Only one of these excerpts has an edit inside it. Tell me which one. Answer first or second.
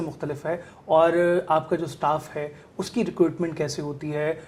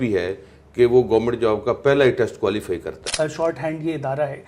second